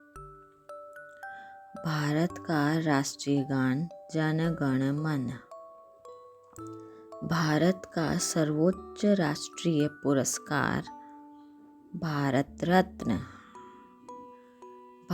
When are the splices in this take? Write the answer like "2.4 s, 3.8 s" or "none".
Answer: 1.4 s, 5.4 s, 6.9 s